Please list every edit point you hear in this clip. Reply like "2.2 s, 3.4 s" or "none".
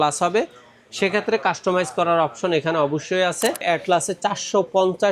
3.6 s